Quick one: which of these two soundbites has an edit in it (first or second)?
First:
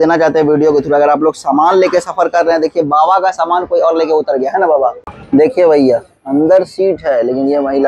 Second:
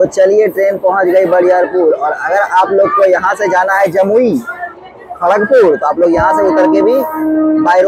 first